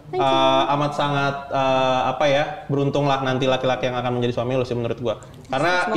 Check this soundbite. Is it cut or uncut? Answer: uncut